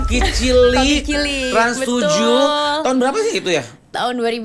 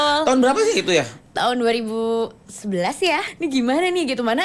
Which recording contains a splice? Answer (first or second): second